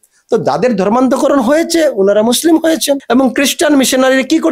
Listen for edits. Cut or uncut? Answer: uncut